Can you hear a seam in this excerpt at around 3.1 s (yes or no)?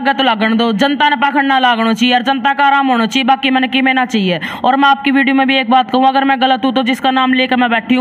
no